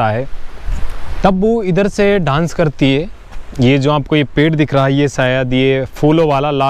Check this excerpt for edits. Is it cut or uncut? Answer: uncut